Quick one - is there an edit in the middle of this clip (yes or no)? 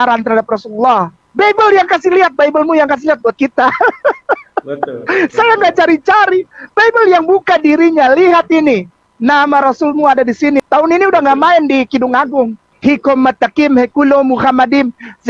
yes